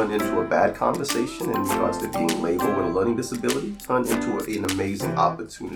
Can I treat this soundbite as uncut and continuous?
yes; 0 cuts

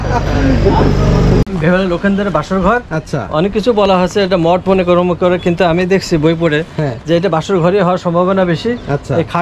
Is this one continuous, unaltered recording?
no; 1 cut; at 1.4 s

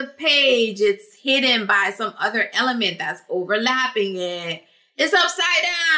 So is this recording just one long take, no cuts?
yes; 0 cuts

